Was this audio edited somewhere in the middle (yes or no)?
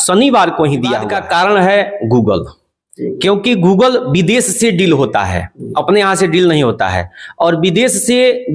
yes